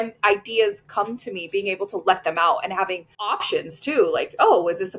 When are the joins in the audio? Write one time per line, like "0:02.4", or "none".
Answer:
none